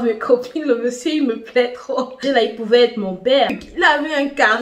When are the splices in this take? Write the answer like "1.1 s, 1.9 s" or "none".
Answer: 2.2 s, 3.6 s